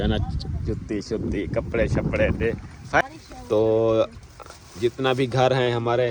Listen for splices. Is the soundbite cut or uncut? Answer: cut